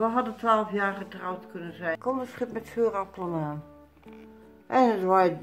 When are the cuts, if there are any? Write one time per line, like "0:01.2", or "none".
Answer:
0:01.8